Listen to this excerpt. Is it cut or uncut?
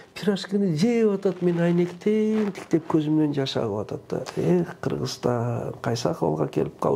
uncut